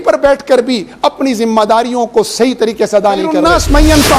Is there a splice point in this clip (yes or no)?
yes